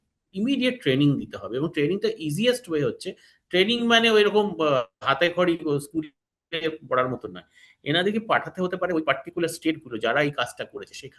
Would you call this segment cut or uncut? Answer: uncut